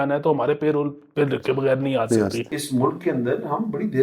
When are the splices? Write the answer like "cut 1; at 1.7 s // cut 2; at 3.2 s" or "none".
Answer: cut 1; at 2.6 s